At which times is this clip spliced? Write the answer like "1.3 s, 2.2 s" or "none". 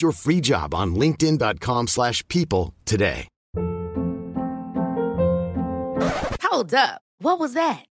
3.3 s

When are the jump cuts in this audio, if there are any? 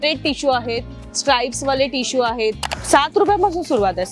0.9 s, 2.6 s

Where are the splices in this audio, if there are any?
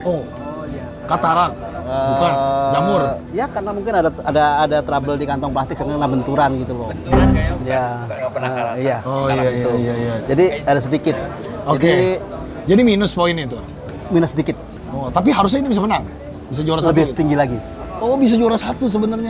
none

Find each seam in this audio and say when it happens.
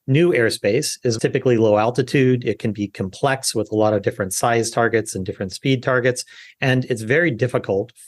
1.2 s

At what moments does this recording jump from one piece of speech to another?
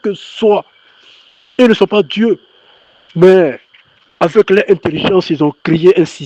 5.2 s

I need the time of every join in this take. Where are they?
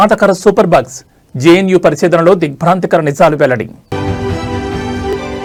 none

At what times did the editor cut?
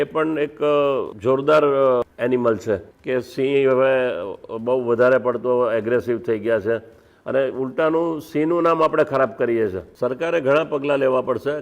2.9 s, 9.9 s

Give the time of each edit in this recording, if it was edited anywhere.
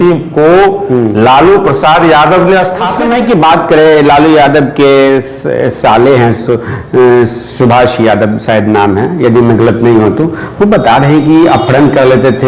2.9 s

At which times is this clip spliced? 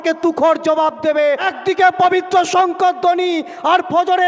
1.5 s

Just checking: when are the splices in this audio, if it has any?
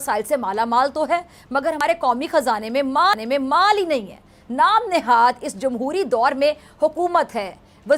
none

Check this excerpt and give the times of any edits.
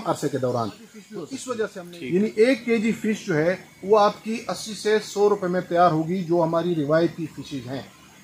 1.9 s

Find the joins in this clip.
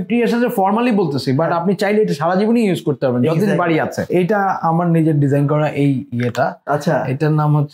4.1 s

